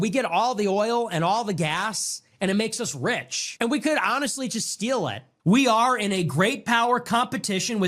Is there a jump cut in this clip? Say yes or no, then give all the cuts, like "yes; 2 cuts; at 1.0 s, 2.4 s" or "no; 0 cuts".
no; 0 cuts